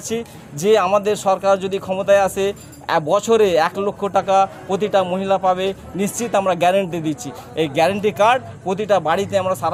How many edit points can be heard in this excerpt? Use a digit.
0